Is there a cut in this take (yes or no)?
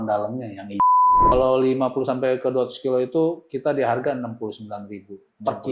yes